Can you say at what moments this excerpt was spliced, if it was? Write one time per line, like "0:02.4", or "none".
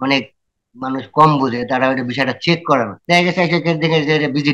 0:03.0